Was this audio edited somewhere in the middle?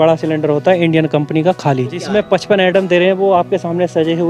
yes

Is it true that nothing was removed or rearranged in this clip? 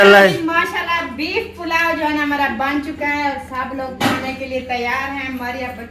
yes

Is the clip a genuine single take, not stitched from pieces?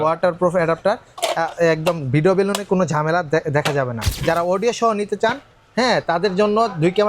no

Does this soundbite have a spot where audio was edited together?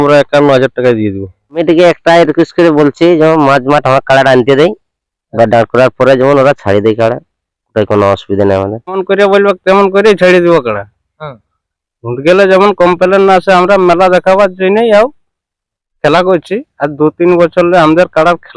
yes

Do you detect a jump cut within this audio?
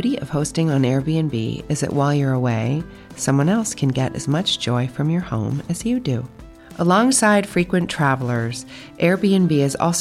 no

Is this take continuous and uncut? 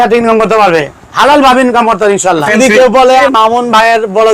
no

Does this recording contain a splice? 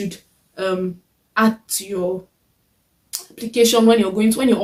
no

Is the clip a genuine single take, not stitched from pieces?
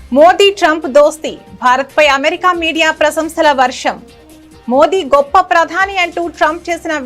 yes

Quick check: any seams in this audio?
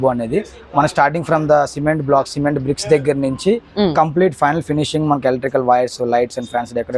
no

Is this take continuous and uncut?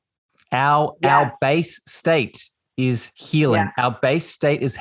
yes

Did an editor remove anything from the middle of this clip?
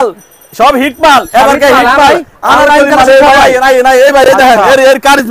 no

